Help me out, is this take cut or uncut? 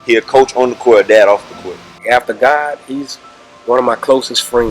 cut